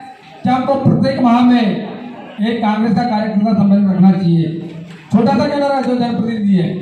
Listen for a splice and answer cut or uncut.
uncut